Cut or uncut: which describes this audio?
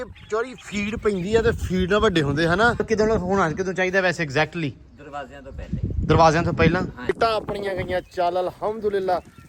cut